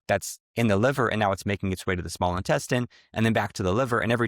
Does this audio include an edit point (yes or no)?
no